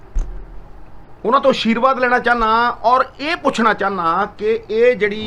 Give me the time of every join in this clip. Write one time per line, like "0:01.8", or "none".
none